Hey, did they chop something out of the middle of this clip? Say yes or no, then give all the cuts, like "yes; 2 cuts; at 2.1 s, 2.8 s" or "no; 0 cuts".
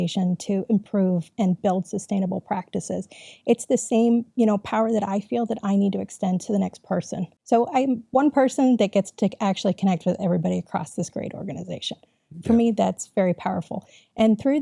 yes; 1 cut; at 7.3 s